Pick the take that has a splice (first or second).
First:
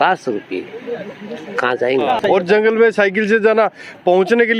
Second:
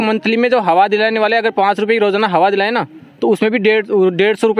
first